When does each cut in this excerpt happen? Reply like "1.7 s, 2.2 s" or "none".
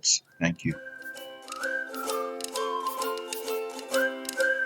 1.0 s

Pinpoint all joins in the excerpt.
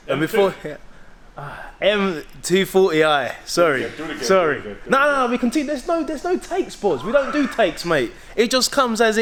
none

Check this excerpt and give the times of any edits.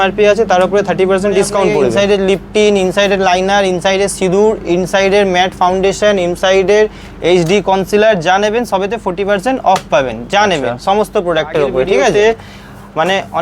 1.9 s, 12.1 s

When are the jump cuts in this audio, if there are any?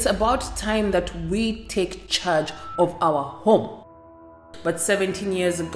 4.4 s

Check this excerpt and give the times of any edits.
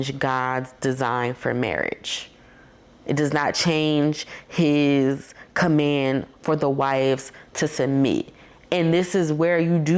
none

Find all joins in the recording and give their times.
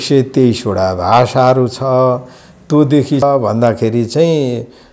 3.2 s

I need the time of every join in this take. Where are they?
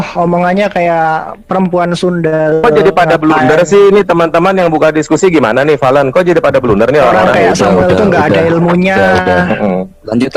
none

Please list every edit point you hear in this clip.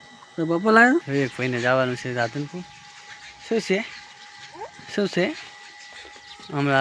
1.1 s

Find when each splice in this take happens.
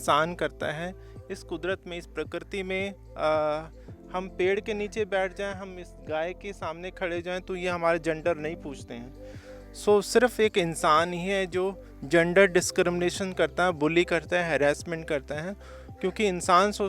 none

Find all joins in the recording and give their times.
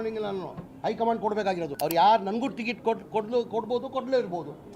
1.7 s

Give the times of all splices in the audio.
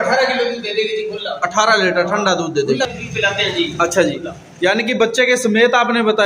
2.9 s

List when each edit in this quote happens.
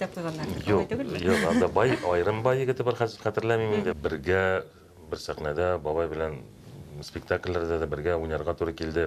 4.0 s

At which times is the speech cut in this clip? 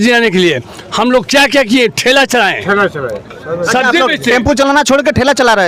none

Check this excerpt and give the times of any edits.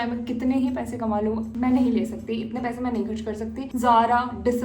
3.7 s

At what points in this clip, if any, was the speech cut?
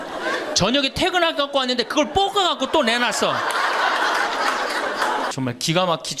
5.3 s

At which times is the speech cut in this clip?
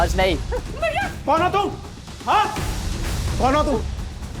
1.0 s

